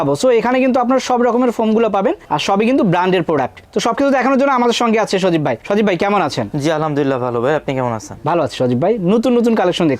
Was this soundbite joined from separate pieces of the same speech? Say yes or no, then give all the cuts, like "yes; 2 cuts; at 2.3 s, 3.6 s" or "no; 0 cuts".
no; 0 cuts